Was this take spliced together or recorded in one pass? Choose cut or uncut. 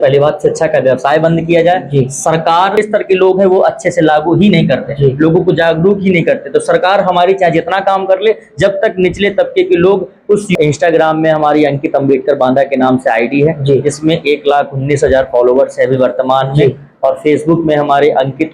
cut